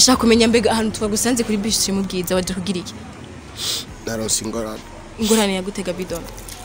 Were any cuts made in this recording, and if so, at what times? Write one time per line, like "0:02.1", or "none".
0:03.9